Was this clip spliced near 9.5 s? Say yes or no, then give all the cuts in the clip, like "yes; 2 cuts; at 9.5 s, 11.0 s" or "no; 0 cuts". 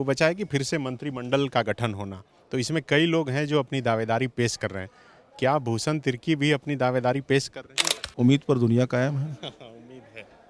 no; 1 cut; at 8.0 s